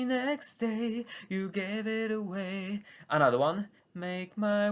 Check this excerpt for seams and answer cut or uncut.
uncut